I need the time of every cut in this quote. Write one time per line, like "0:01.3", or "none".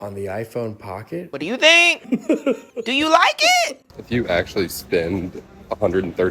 0:01.3
0:02.7
0:03.9